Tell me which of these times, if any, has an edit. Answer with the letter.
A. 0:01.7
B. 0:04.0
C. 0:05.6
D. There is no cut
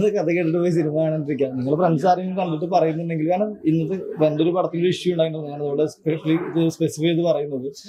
D